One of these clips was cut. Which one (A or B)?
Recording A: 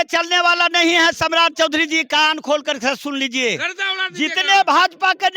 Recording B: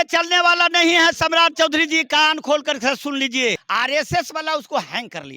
B